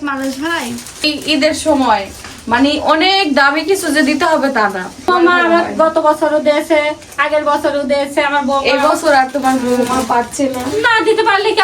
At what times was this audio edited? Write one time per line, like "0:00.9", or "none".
0:01.0
0:05.1